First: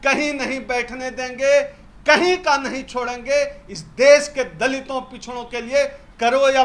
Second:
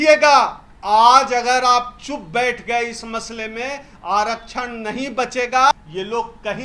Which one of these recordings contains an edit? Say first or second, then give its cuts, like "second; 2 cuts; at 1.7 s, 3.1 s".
second; 1 cut; at 5.7 s